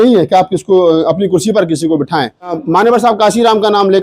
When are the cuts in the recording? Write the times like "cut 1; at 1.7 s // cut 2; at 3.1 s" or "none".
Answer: cut 1; at 2.5 s